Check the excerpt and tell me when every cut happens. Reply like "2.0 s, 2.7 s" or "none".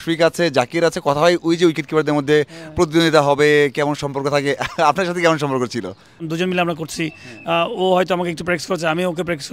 6.2 s

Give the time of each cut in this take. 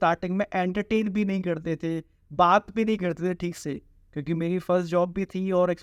none

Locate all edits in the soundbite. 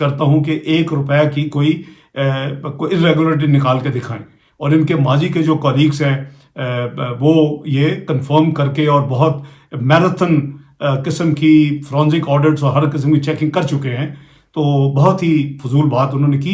none

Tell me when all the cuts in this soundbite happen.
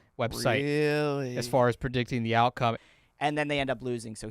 2.8 s

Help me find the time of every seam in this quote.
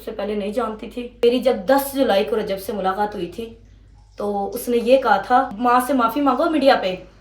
1.2 s, 5.5 s

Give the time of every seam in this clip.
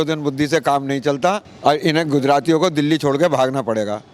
1.5 s

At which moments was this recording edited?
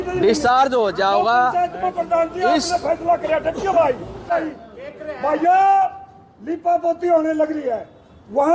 4.3 s

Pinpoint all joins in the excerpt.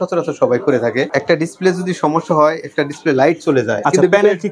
1.1 s, 3.8 s

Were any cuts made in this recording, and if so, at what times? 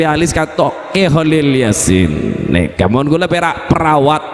none

